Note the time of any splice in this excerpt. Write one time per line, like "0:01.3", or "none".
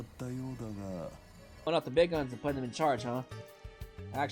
0:01.7